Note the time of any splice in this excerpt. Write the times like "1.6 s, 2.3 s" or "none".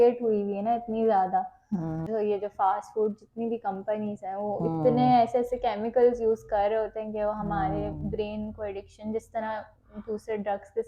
none